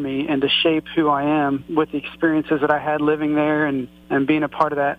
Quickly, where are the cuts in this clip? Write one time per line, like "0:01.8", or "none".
0:01.7
0:03.9